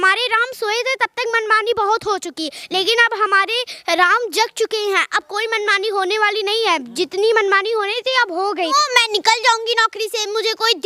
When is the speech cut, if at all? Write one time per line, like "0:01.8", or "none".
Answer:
0:08.7

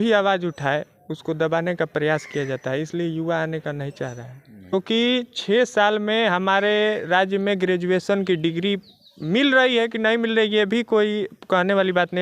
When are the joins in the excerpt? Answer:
0:04.7

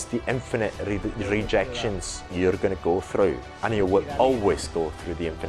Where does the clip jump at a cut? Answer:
none

